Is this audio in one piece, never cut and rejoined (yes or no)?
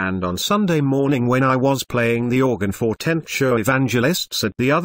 no